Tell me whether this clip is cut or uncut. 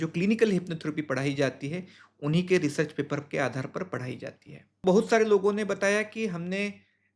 cut